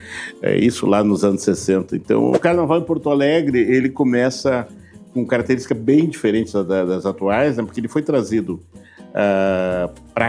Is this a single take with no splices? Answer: no; 1 cut; at 2.4 s

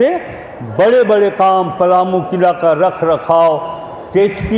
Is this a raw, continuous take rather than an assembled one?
yes; 0 cuts

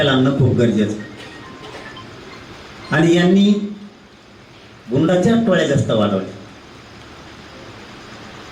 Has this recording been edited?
no; 0 cuts

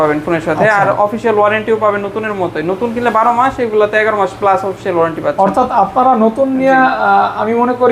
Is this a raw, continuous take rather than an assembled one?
yes; 0 cuts

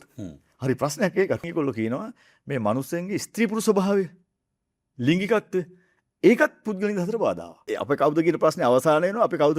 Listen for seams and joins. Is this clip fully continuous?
no; 2 cuts; at 1.4 s, 7.7 s

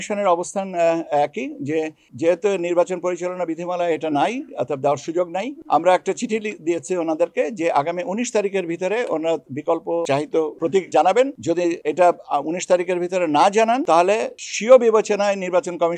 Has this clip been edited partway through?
no; 0 cuts

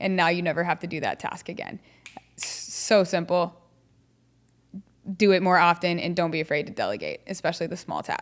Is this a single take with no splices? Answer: yes; 0 cuts

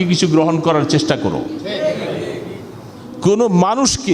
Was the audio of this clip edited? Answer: yes; 1 cut; at 3.0 s

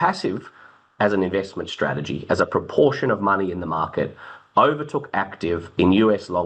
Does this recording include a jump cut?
no; 0 cuts

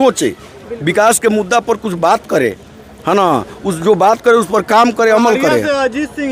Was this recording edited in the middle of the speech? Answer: no; 0 cuts

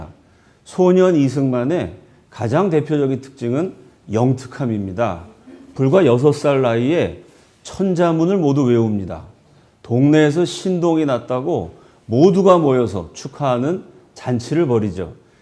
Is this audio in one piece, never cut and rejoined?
no; 1 cut; at 3.2 s

